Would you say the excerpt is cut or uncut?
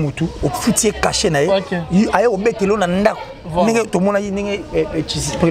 uncut